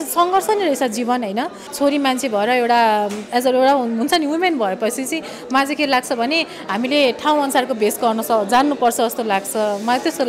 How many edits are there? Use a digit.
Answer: 1